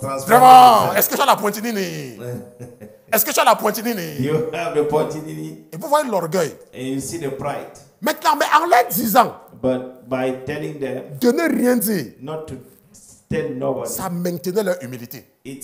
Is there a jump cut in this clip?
no; 0 cuts

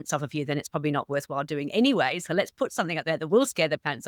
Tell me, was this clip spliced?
no; 0 cuts

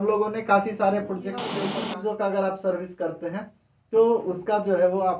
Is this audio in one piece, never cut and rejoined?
no; 1 cut; at 1.7 s

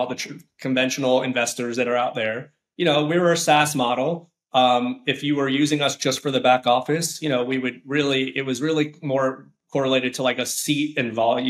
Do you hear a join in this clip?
no; 0 cuts

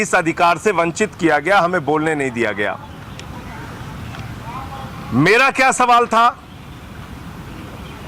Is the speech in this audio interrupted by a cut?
no; 0 cuts

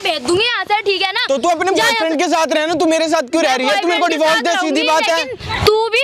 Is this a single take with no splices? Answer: yes; 0 cuts

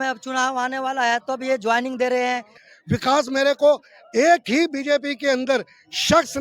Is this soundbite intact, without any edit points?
no; 1 cut; at 2.6 s

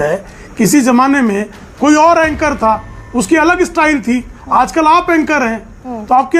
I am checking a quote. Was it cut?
no; 0 cuts

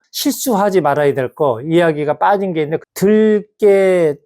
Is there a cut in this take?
yes; 1 cut; at 2.8 s

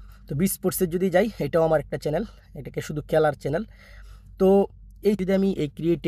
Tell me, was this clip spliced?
yes; 1 cut; at 5.2 s

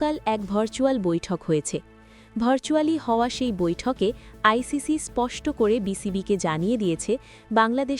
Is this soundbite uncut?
yes; 0 cuts

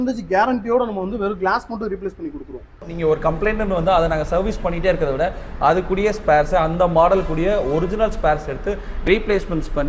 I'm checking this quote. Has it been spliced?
yes; 1 cut; at 2.9 s

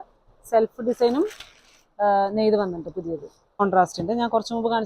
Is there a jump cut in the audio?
yes; 1 cut; at 3.6 s

